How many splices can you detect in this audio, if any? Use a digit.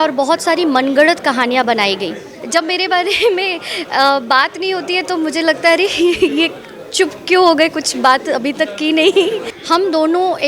2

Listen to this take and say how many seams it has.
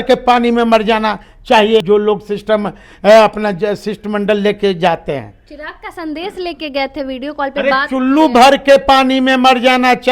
1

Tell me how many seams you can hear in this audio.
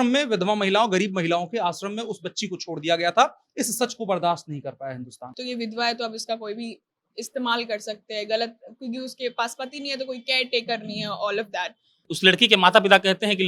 2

